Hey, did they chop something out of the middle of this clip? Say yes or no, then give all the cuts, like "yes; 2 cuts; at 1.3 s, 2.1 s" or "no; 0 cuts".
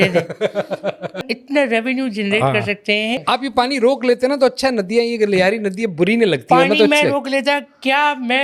yes; 2 cuts; at 1.4 s, 3.2 s